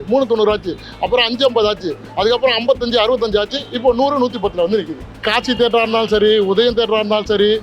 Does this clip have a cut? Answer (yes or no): yes